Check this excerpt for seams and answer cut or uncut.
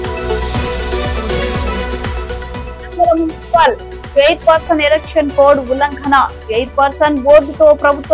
uncut